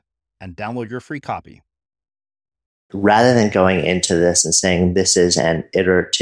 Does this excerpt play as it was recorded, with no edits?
no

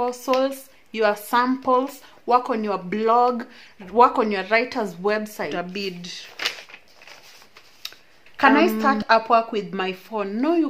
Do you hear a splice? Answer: no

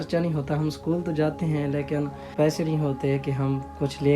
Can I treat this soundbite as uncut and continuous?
no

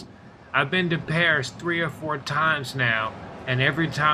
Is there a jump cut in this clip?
yes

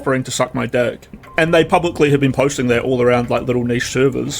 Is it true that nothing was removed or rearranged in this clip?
no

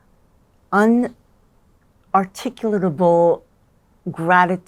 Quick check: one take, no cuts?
yes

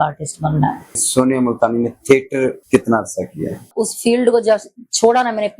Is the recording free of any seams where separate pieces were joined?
no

